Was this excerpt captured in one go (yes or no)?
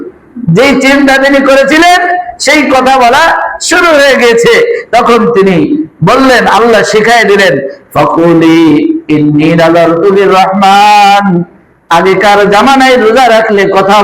yes